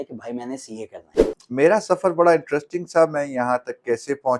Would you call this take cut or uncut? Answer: cut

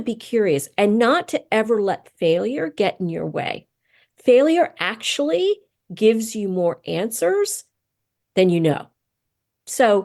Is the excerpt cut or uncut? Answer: uncut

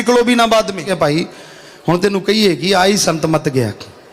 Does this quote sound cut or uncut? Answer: cut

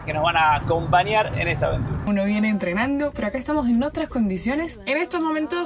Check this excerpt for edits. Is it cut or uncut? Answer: cut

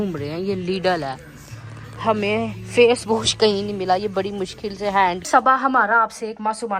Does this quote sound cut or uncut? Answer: cut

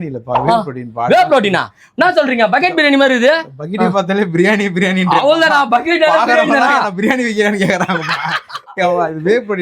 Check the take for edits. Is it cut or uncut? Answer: uncut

